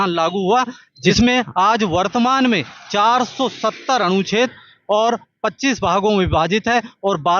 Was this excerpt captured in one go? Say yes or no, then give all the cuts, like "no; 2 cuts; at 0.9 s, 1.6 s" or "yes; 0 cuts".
no; 1 cut; at 1.0 s